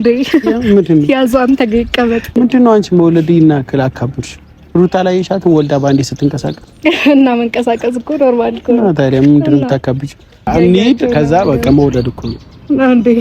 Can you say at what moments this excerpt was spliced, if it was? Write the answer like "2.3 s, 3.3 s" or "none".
2.3 s, 10.5 s